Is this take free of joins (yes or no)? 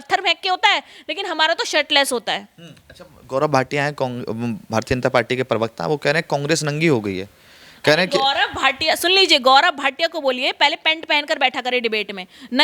yes